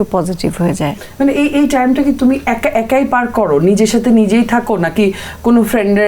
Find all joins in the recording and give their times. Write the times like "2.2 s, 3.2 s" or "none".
none